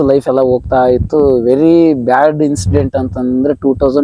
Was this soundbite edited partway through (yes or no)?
no